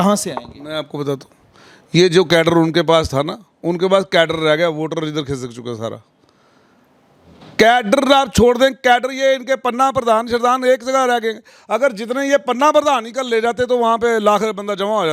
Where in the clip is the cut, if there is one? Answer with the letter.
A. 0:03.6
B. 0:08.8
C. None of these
C